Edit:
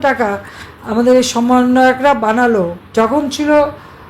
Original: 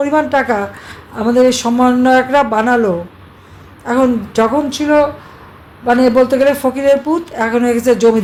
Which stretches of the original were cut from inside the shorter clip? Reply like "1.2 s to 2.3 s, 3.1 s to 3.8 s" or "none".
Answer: 3.1 s to 4.3 s